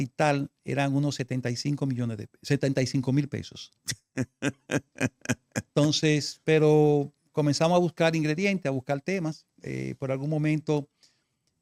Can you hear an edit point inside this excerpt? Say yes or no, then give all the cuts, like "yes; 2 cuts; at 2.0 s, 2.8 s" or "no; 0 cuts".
no; 0 cuts